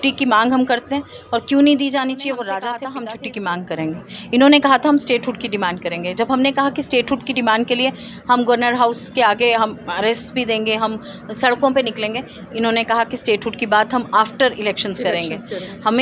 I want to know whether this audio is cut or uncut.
cut